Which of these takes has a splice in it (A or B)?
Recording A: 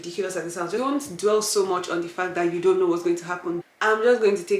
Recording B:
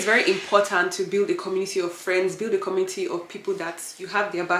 A